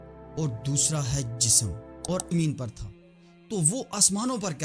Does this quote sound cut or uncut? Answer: cut